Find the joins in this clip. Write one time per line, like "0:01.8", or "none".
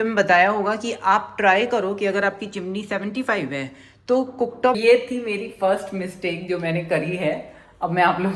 0:04.8